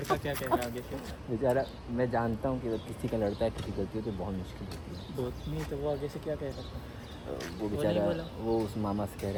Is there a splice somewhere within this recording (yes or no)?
no